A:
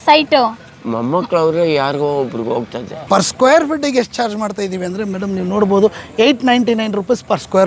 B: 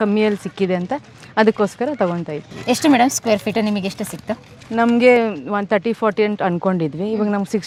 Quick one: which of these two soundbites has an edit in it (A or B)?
A